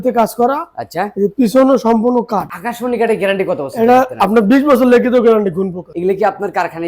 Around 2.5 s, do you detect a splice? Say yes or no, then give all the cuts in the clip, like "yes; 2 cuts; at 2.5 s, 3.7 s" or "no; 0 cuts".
yes; 2 cuts; at 2.5 s, 5.8 s